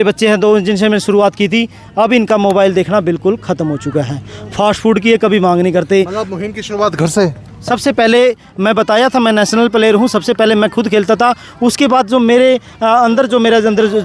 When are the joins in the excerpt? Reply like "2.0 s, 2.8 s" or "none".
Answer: none